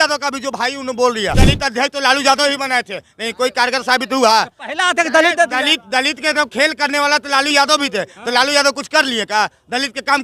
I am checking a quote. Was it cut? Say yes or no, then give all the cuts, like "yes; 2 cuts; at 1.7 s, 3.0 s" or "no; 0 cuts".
yes; 1 cut; at 1.4 s